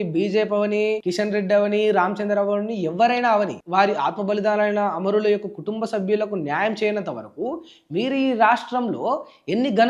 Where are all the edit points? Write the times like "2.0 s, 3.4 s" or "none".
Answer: none